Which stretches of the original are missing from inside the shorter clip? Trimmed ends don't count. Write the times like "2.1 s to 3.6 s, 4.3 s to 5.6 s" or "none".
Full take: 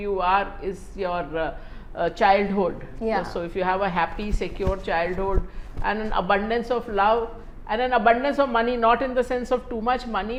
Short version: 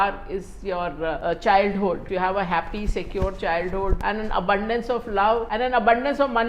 1.5 s to 1.9 s, 2.8 s to 3.5 s, 5.4 s to 5.8 s, 7.3 s to 7.7 s